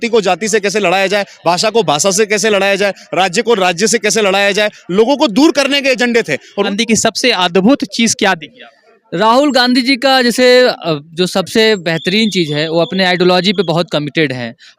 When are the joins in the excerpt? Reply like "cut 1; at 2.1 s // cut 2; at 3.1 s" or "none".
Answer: cut 1; at 6.7 s